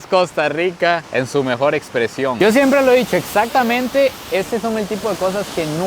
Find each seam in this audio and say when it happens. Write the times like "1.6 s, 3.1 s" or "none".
none